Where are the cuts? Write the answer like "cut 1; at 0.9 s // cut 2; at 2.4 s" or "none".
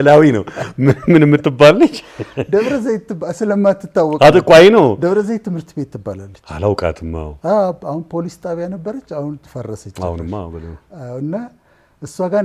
none